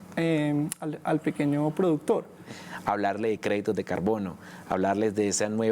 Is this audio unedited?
no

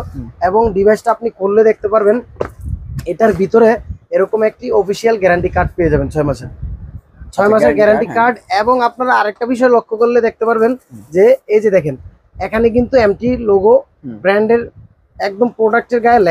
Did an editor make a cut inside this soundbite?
no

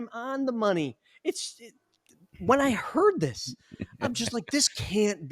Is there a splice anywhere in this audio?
no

